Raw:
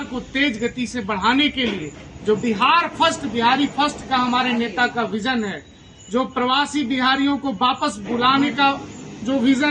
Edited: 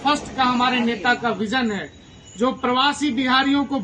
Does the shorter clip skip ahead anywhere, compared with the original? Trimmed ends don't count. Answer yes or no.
no